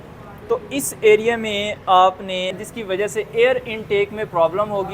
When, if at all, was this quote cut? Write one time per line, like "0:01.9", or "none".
0:02.6